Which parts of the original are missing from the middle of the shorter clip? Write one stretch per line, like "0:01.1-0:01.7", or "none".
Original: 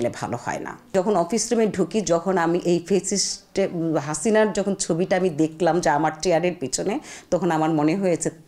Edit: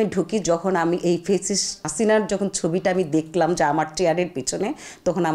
0:03.5-0:04.1